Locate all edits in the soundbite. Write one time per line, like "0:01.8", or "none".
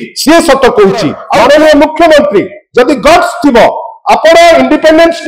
0:01.2

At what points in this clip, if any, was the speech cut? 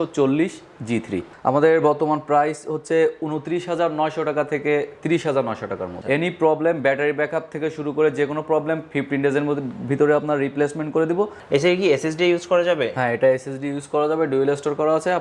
0:01.3
0:05.9
0:11.4

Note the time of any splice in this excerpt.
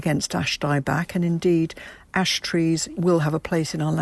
0:02.9

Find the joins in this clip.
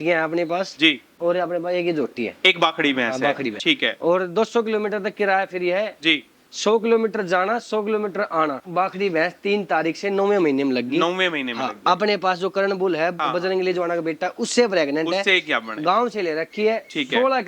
0:03.6
0:08.6

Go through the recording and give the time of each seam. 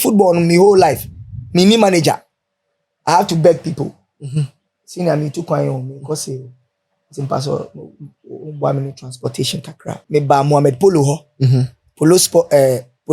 0:10.0

